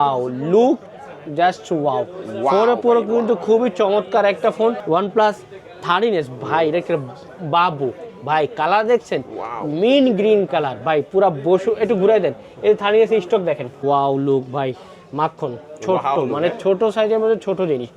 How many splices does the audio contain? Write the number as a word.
two